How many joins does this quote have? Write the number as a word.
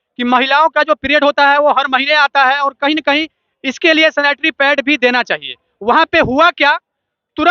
zero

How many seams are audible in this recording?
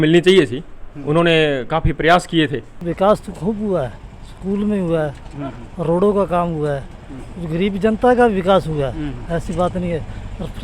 one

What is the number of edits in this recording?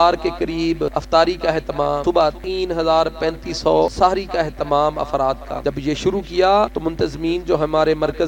five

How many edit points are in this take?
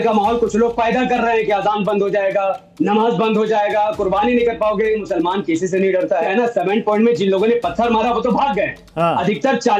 two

